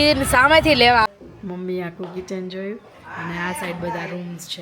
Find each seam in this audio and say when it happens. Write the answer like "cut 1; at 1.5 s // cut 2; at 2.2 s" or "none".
cut 1; at 1.1 s